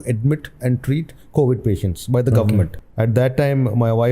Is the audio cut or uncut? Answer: cut